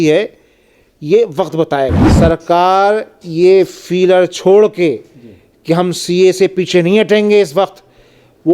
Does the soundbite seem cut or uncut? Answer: cut